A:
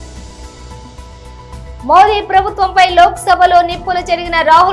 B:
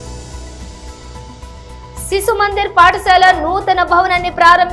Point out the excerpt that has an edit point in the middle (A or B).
A